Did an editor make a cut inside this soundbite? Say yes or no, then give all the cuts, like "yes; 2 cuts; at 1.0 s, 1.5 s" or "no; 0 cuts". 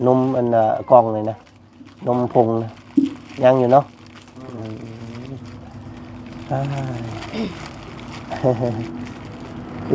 no; 0 cuts